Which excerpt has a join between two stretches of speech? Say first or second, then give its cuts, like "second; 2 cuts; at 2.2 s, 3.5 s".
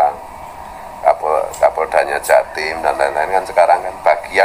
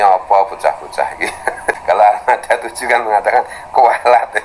second; 1 cut; at 1.8 s